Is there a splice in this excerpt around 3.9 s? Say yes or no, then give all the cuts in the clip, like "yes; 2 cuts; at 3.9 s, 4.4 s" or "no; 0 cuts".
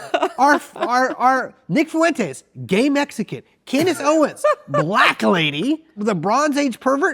no; 1 cut; at 6.0 s